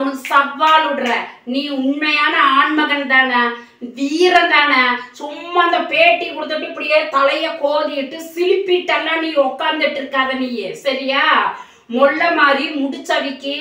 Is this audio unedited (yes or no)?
yes